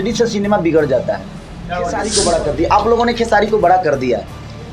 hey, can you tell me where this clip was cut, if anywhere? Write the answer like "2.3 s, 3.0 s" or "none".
2.1 s